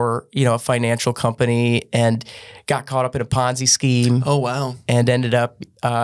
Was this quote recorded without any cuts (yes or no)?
yes